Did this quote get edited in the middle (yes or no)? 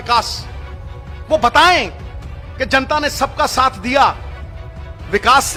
no